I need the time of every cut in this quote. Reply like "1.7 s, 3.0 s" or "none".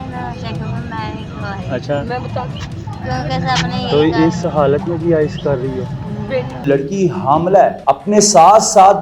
6.6 s, 7.8 s